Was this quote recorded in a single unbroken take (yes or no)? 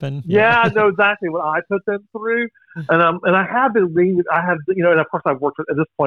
yes